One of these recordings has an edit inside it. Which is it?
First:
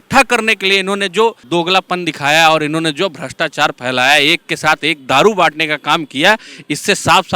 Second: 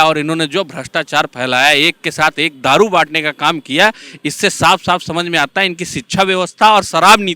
first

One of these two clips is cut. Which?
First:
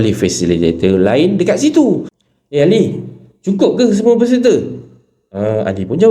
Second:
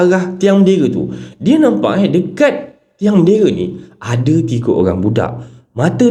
first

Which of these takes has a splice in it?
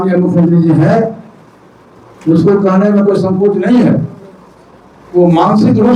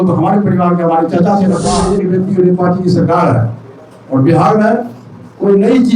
second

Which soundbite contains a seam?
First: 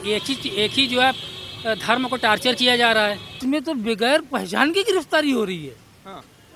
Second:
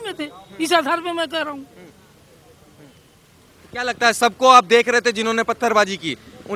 first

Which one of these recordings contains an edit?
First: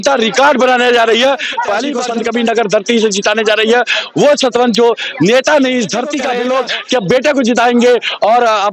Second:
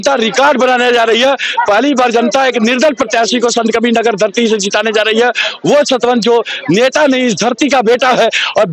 first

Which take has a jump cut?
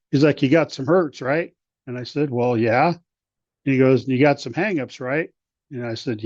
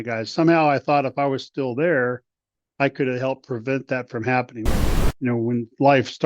second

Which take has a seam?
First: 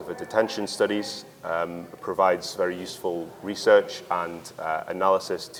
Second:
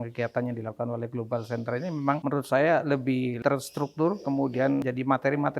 second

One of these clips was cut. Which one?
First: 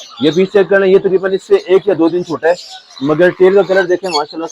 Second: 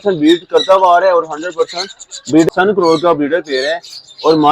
second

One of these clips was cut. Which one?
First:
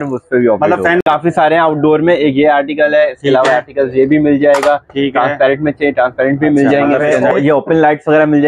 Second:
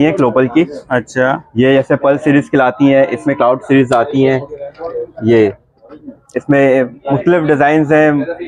first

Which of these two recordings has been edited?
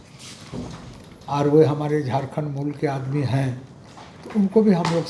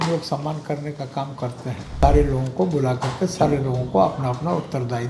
second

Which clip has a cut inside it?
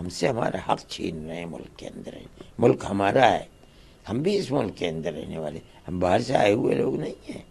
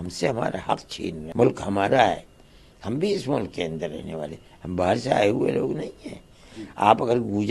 second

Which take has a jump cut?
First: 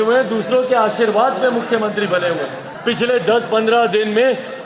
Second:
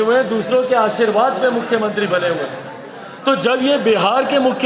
first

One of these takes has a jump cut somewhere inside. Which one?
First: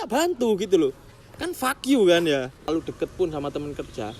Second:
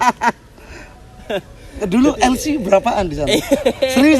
first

